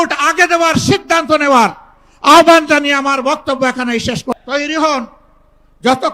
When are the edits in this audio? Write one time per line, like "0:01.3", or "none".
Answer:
0:04.3